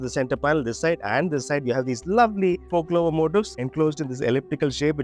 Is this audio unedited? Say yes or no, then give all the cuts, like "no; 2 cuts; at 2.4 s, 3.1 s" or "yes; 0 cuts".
yes; 0 cuts